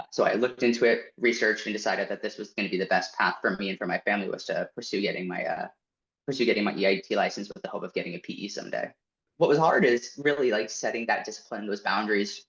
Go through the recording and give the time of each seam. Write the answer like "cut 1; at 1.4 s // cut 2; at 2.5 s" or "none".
cut 1; at 9.3 s